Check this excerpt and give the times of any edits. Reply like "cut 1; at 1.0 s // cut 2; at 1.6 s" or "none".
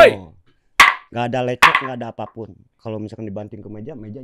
cut 1; at 1.0 s // cut 2; at 2.6 s